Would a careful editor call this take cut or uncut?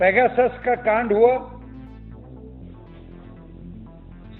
uncut